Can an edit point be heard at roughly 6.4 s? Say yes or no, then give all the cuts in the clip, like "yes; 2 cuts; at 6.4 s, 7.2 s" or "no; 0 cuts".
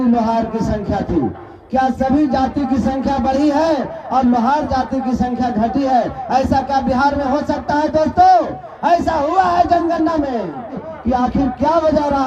no; 1 cut; at 10.9 s